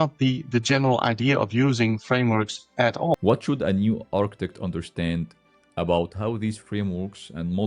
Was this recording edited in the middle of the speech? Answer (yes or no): yes